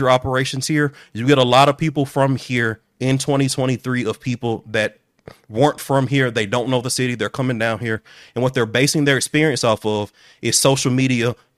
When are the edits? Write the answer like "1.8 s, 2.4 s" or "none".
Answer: none